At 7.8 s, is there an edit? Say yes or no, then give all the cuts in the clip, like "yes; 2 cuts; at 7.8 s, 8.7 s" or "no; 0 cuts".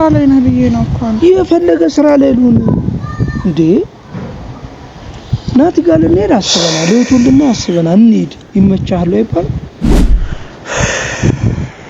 no; 1 cut; at 10.0 s